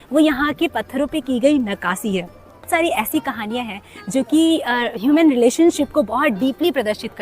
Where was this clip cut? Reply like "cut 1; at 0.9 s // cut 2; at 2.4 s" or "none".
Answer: cut 1; at 2.7 s